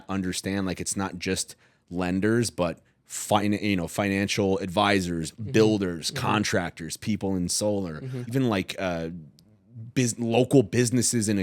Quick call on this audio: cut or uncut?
cut